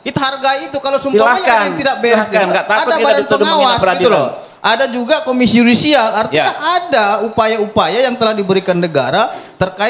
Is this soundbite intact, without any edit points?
yes; 0 cuts

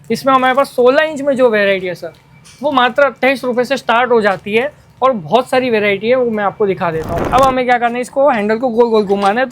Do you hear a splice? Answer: yes; 1 cut; at 7.2 s

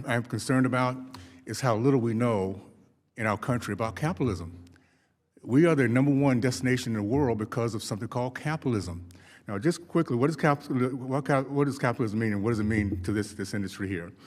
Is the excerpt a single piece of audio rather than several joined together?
yes; 0 cuts

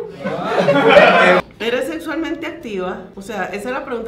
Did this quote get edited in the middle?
yes; 2 cuts; at 1.4 s, 3.1 s

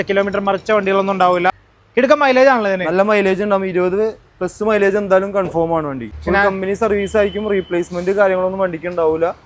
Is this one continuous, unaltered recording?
no; 2 cuts; at 1.7 s, 6.1 s

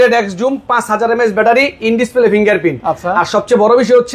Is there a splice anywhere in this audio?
no; 0 cuts

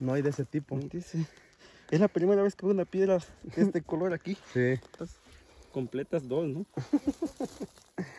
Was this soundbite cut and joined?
yes; 1 cut; at 5.0 s

